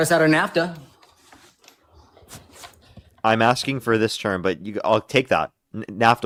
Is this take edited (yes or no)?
no